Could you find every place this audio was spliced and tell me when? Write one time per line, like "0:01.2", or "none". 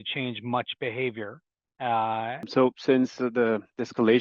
0:02.5

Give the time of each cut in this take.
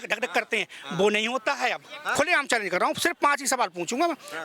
0:02.0

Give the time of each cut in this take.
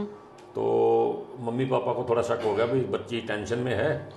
none

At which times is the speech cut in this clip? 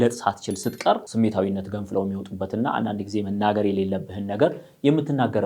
0:01.1

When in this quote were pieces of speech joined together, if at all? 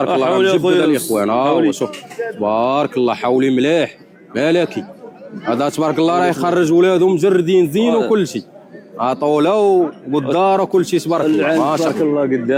none

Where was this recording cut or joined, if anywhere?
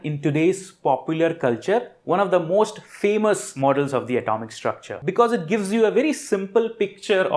0:03.5
0:04.9

